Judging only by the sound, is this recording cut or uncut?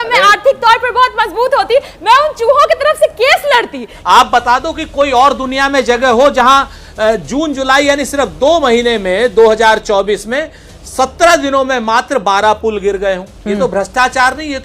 cut